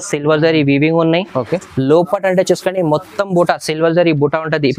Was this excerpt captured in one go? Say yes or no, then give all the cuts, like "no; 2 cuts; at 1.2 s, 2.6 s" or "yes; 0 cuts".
yes; 0 cuts